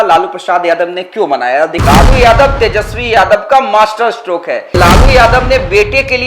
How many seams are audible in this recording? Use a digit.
2